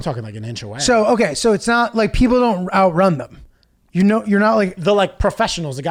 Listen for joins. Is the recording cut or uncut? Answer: uncut